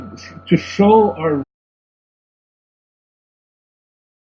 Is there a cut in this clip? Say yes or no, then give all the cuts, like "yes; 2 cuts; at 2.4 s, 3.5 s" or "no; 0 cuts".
no; 0 cuts